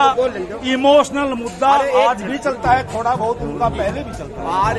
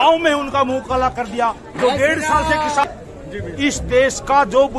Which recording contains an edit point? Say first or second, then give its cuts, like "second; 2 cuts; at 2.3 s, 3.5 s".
second; 1 cut; at 2.8 s